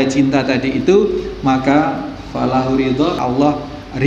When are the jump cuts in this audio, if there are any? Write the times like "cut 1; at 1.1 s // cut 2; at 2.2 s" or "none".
cut 1; at 3.2 s